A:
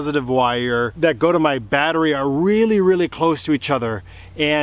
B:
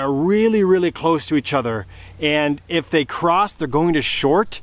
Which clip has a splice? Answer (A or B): A